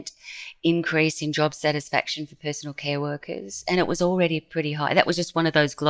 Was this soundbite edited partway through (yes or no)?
no